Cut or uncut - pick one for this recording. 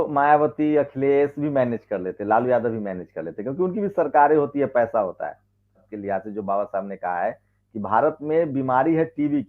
cut